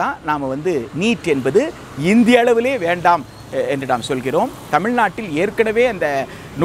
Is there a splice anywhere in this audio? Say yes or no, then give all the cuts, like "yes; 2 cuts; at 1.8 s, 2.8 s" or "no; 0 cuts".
no; 0 cuts